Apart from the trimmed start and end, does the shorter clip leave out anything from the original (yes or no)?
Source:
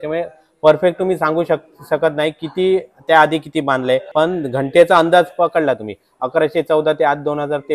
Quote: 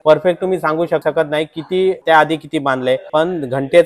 yes